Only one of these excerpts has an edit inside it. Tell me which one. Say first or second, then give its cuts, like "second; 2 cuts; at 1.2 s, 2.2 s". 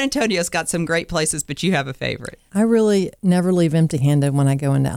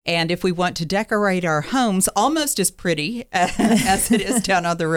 first; 2 cuts; at 2.3 s, 3.1 s